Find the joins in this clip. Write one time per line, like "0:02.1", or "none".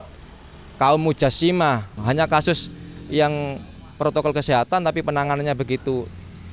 0:02.0